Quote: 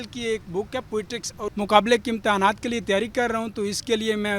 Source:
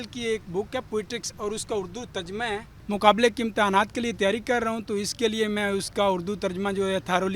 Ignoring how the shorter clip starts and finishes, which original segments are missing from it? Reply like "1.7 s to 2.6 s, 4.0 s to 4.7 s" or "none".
1.5 s to 2.8 s